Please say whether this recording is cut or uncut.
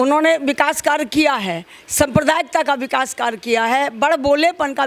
uncut